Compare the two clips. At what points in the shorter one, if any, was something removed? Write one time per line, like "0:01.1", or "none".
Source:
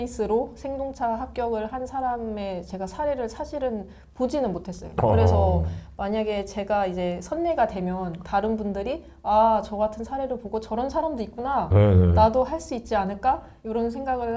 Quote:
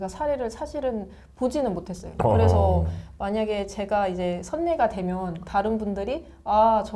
none